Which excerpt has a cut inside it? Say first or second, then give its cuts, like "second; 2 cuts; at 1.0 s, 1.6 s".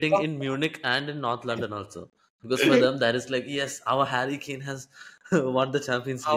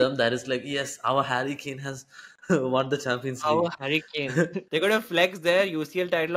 second; 1 cut; at 4.6 s